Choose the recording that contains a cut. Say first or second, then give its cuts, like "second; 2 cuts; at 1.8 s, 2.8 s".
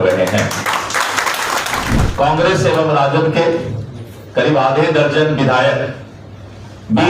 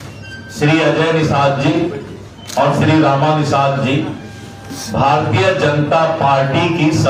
first; 1 cut; at 2.0 s